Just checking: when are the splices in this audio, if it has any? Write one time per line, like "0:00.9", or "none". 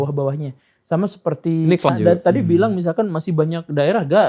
0:01.9